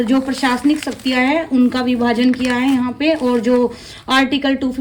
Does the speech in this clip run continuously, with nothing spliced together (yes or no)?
yes